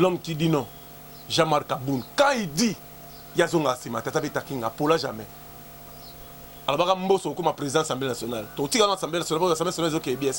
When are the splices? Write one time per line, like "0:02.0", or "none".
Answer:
none